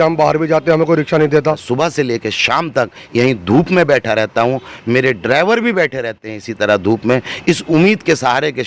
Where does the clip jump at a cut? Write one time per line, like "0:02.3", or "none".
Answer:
0:01.6